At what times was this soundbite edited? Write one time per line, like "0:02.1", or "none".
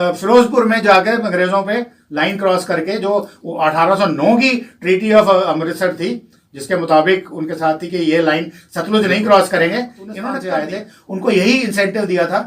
0:10.3